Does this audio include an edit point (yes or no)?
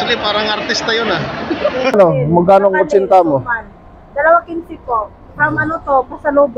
yes